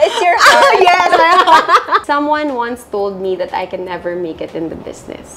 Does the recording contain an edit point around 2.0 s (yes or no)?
yes